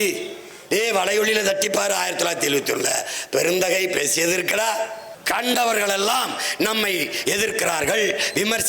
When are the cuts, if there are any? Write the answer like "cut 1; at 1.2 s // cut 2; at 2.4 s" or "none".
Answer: cut 1; at 5.1 s